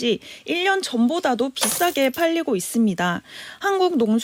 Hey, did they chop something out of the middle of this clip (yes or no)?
no